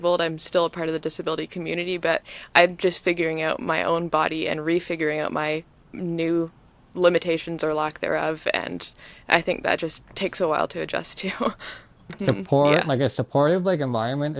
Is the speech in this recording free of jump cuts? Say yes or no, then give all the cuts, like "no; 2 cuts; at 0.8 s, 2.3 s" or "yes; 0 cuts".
no; 1 cut; at 12.1 s